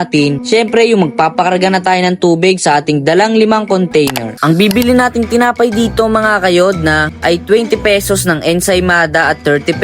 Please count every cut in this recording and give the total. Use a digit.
1